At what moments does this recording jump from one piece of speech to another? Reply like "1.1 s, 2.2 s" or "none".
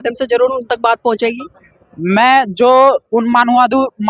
none